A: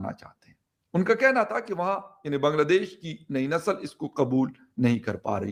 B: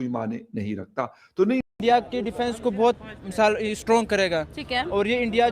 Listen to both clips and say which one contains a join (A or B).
B